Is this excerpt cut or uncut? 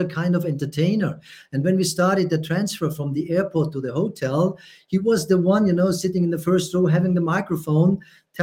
uncut